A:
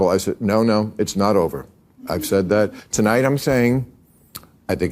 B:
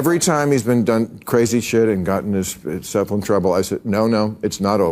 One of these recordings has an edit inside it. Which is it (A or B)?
A